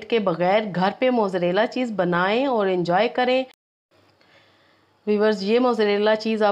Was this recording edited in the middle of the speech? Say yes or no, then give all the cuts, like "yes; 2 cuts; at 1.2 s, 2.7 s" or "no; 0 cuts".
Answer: yes; 1 cut; at 3.6 s